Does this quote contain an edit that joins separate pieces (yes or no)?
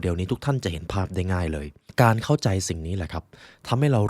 yes